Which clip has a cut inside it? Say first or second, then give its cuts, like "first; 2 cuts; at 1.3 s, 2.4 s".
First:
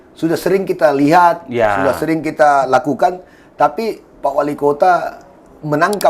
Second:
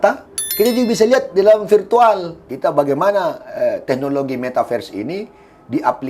second; 1 cut; at 2.4 s